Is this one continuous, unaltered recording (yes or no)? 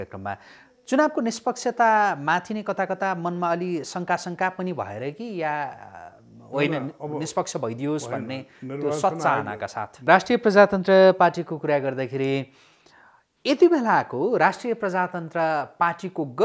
no